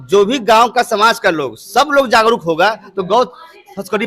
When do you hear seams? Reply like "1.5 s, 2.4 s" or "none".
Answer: none